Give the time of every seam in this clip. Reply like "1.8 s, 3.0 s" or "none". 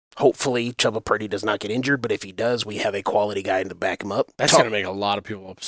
4.4 s